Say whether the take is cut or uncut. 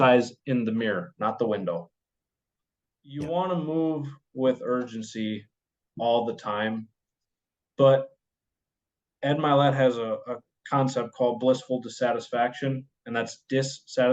cut